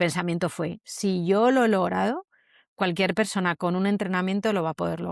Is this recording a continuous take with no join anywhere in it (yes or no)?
no